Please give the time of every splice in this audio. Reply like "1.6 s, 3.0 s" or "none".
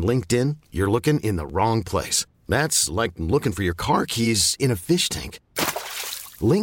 none